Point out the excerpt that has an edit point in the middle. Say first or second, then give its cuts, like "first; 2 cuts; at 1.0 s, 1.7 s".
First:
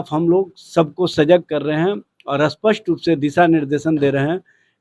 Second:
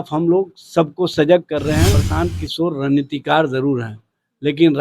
second; 1 cut; at 2.0 s